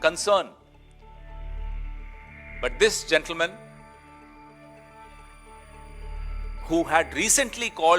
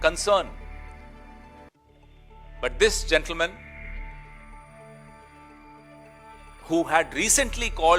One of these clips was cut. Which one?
first; 3 cuts; at 3.6 s, 5.3 s, 6.6 s

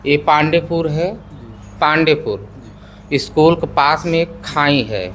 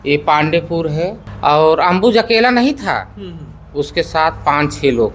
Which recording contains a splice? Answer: second; 1 cut; at 1.2 s

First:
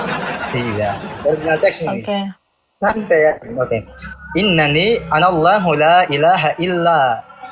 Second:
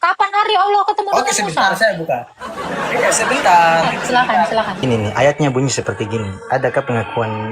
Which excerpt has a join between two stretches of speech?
second; 1 cut; at 4.8 s

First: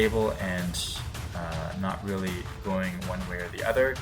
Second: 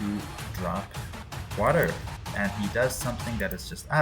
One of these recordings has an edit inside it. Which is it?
second; 1 cut; at 2.3 s

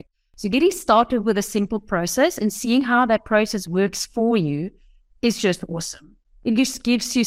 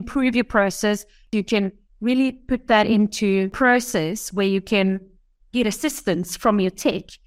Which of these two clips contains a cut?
second; 2 cuts; at 1.3 s, 3.5 s

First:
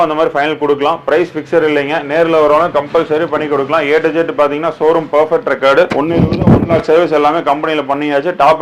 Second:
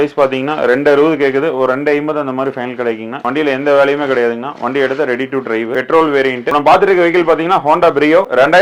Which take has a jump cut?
second; 2 cuts; at 3.2 s, 6.4 s

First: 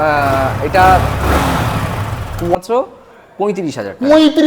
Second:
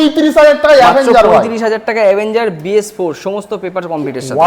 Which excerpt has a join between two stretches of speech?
first; 1 cut; at 2.5 s

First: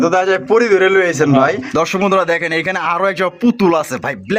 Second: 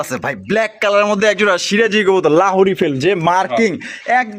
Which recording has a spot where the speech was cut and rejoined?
first; 1 cut; at 1.6 s

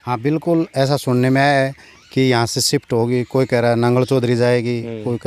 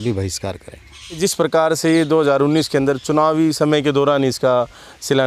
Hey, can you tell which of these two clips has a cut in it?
second; 1 cut; at 1.2 s

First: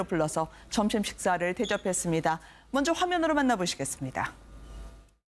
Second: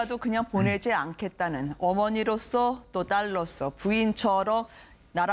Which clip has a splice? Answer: second; 1 cut; at 1.5 s

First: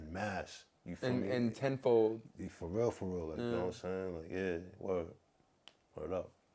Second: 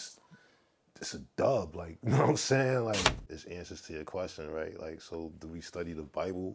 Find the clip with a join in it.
second; 1 cut; at 3.1 s

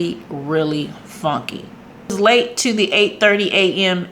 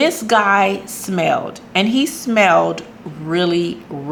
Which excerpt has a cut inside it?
first; 1 cut; at 2.0 s

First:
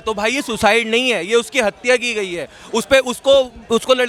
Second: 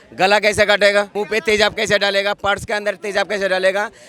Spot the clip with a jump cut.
second; 1 cut; at 1.2 s

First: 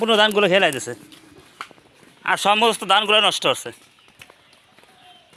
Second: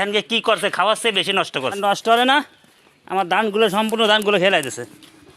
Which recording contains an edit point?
second; 1 cut; at 1.8 s

